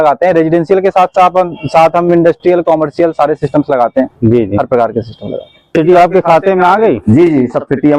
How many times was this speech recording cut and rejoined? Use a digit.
1